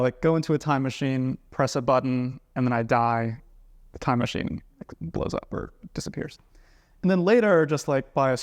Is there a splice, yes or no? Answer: no